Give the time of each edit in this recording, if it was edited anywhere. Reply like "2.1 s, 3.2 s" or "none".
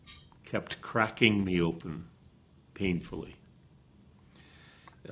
none